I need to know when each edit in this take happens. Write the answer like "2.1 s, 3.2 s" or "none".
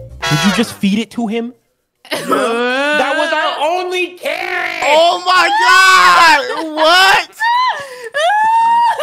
none